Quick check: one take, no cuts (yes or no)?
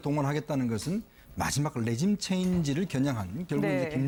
yes